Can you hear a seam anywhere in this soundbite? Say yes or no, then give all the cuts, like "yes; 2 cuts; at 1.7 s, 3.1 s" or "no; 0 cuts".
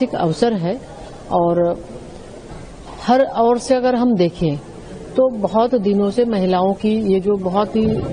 no; 0 cuts